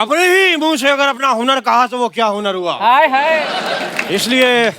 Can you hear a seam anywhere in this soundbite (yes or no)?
no